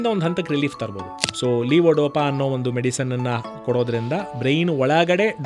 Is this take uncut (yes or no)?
no